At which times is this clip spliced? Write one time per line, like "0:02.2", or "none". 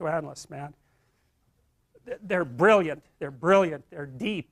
none